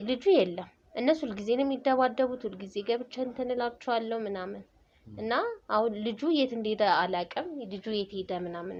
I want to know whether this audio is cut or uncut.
uncut